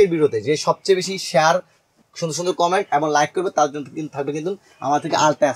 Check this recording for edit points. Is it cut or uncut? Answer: uncut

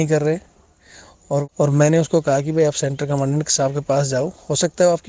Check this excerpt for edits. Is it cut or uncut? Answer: cut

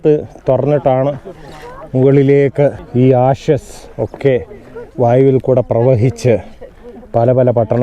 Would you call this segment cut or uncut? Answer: cut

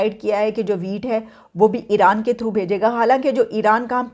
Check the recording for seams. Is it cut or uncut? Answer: uncut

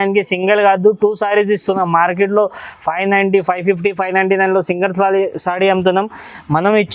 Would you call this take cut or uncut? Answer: uncut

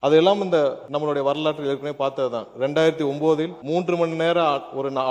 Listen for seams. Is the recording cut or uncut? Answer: cut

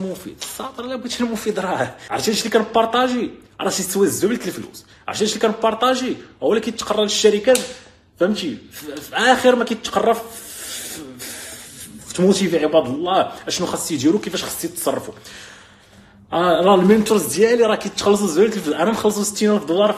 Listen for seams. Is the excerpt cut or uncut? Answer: cut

